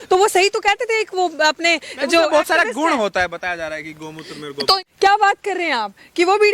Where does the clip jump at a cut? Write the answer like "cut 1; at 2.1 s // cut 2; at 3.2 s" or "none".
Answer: cut 1; at 4.8 s